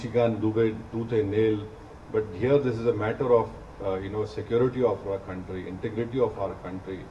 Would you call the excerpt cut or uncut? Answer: uncut